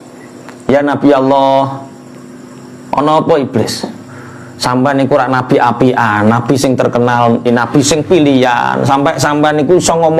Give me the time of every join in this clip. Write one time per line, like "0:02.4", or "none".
0:07.5